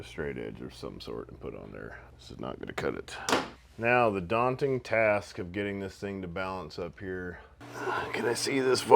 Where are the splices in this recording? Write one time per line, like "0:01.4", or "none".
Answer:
0:03.5
0:07.6

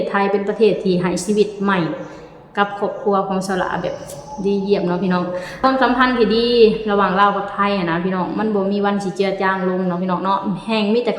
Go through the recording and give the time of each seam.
0:05.5

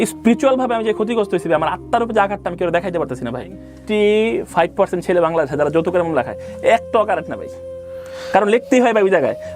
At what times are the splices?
0:03.7

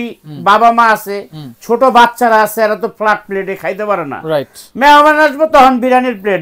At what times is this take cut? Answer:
none

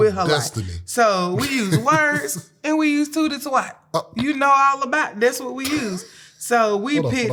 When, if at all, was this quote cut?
none

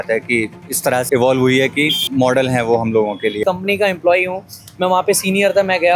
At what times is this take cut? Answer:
0:01.0
0:02.1
0:03.4

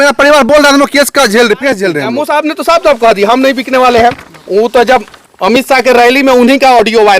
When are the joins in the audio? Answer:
0:02.1

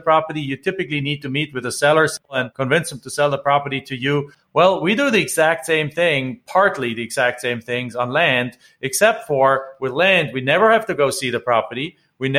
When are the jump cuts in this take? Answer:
0:02.3
0:04.4

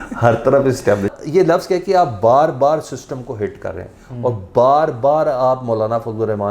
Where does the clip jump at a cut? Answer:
0:01.2

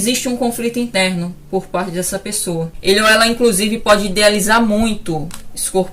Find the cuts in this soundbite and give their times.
0:02.7

